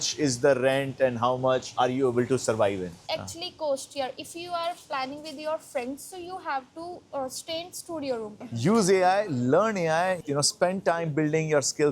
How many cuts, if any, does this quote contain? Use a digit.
3